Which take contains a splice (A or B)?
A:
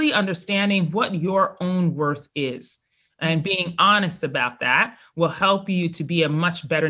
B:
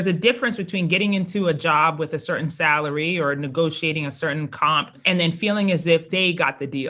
B